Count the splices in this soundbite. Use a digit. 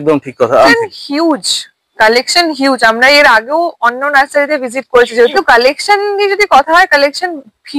2